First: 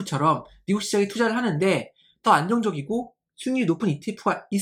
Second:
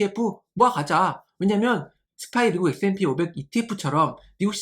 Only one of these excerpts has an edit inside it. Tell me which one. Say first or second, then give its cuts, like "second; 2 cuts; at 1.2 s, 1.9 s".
second; 1 cut; at 2.0 s